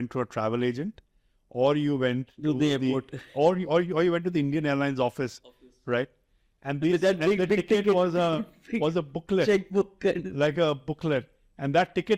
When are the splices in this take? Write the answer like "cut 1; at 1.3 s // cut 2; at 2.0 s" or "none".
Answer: none